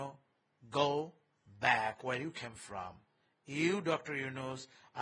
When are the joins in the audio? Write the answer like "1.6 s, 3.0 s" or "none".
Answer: none